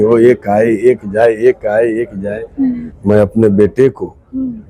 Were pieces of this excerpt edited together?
yes; 1 cut; at 2.9 s

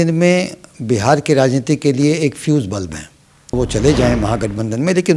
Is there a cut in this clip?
yes; 1 cut; at 3.6 s

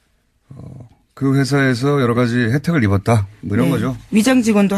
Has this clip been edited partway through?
yes; 1 cut; at 3.6 s

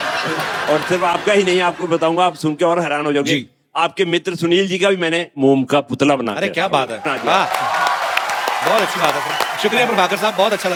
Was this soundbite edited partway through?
no; 0 cuts

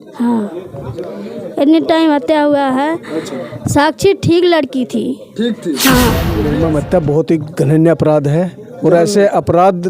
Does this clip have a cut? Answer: yes; 1 cut; at 6.4 s

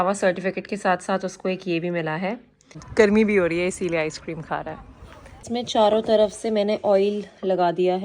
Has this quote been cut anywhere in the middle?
yes; 2 cuts; at 2.8 s, 5.4 s

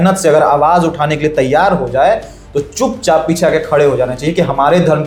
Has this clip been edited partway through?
no; 0 cuts

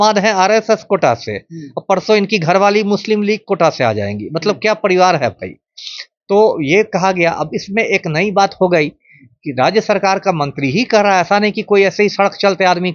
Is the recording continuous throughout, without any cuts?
yes; 0 cuts

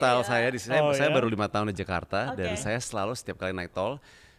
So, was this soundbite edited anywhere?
no; 0 cuts

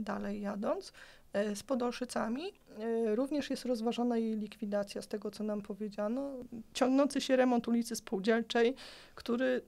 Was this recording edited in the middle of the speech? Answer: yes; 1 cut; at 6.4 s

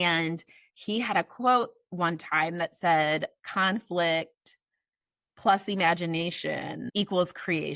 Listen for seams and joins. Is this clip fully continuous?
no; 1 cut; at 6.8 s

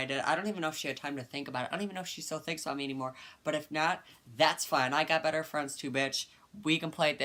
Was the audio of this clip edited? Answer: no; 0 cuts

